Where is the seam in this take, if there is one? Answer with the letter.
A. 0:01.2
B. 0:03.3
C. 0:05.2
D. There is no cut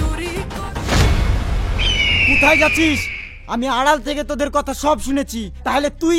D